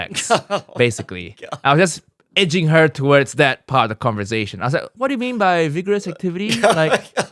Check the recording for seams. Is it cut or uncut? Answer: uncut